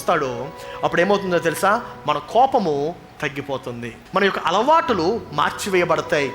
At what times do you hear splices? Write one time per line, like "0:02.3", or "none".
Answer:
0:04.0